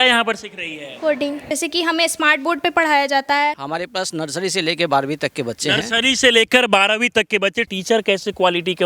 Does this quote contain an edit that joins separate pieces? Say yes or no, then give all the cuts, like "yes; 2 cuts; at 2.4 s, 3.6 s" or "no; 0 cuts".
yes; 3 cuts; at 1.5 s, 3.6 s, 7.7 s